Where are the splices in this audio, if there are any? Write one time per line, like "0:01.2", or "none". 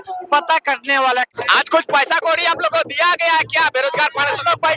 0:01.3